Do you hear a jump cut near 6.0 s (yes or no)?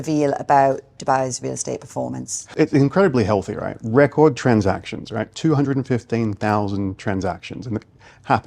no